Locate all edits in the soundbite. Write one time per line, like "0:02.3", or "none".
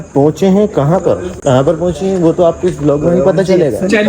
0:01.3